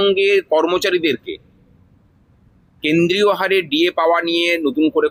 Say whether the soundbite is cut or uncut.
uncut